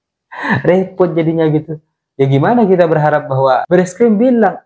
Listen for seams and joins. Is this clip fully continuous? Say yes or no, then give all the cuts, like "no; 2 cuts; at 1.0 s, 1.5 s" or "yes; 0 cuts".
no; 1 cut; at 3.6 s